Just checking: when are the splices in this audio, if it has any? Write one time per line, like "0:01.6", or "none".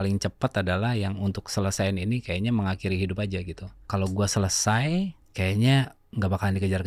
0:03.8
0:05.2